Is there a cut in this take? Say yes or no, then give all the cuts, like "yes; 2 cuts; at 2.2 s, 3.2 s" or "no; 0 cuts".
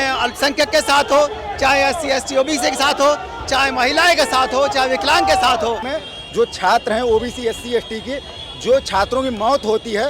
yes; 1 cut; at 5.9 s